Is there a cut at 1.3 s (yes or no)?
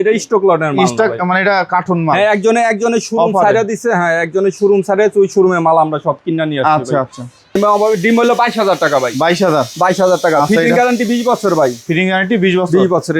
no